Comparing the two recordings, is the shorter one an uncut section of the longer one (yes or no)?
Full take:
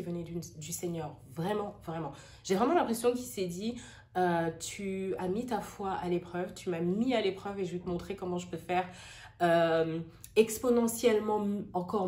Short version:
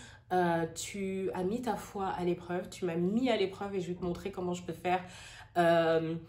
yes